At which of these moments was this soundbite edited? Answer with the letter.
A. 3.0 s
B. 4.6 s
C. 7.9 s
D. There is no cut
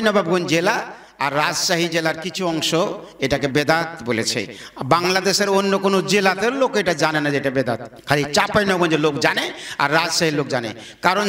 C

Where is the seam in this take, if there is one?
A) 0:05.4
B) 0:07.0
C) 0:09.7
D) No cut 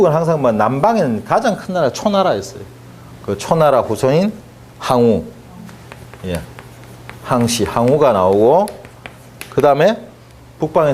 C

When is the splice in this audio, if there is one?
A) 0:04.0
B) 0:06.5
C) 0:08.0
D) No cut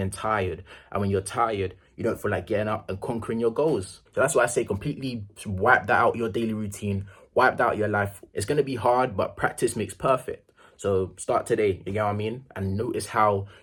D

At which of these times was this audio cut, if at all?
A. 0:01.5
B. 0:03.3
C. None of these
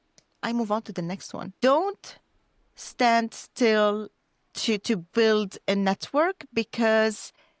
A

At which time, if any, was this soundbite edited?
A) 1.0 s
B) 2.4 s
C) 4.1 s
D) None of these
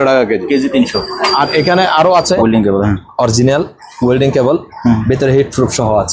B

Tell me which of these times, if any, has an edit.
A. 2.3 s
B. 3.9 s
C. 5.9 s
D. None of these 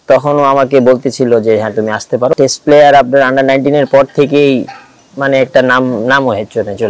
A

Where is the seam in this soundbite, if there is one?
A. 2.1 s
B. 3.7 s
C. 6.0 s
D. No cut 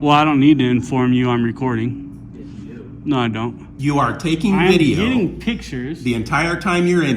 B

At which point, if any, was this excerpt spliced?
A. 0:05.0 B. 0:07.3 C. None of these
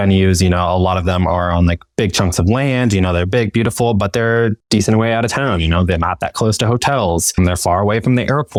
C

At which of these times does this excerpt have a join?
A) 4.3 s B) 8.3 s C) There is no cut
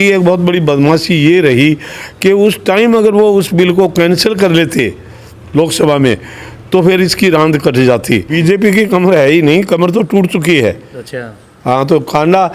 B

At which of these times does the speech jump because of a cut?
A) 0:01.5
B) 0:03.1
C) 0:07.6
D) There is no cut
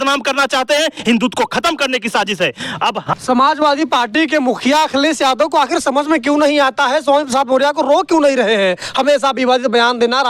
B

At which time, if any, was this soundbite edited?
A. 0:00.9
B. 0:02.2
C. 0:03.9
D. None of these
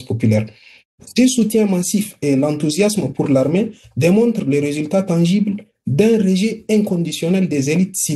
A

